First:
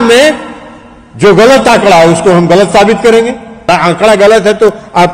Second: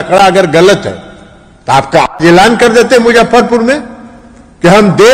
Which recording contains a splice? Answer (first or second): first